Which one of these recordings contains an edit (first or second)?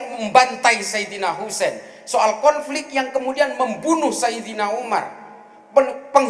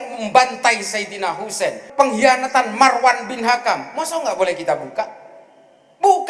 second